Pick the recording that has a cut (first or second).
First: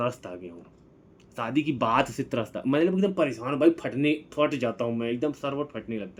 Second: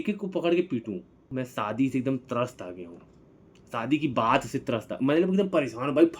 second